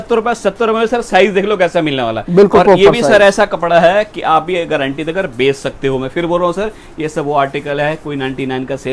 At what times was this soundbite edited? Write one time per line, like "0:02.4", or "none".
none